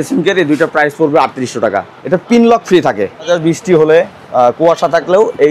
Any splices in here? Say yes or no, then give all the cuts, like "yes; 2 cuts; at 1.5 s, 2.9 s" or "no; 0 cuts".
yes; 2 cuts; at 1.9 s, 3.3 s